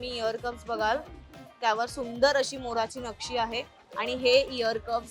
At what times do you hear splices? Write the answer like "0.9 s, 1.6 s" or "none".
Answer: 3.8 s